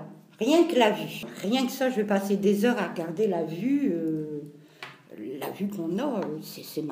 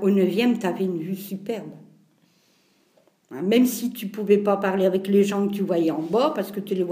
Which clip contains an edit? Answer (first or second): first